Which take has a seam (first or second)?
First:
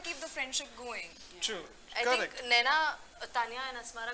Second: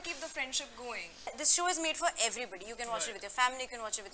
second